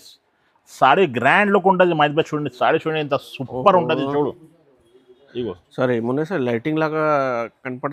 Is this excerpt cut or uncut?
uncut